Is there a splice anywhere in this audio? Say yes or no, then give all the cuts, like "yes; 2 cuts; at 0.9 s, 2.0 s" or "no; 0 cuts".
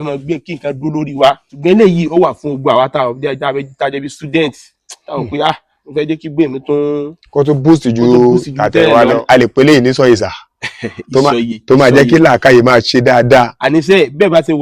yes; 2 cuts; at 1.5 s, 9.2 s